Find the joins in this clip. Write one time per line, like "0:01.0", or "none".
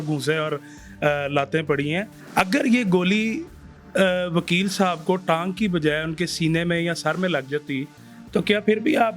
0:02.2